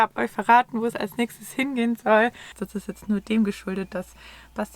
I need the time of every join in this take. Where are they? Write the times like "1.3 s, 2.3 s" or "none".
2.6 s